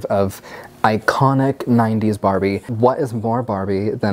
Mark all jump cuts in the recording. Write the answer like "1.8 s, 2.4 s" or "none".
2.7 s